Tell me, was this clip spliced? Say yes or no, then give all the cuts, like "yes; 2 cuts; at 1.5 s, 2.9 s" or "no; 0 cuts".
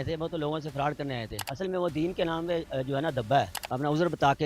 yes; 2 cuts; at 1.4 s, 3.6 s